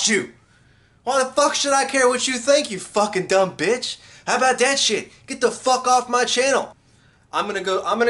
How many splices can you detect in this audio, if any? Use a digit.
0